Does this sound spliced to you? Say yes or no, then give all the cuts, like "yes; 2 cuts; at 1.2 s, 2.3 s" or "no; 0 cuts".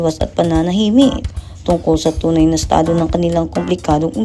no; 0 cuts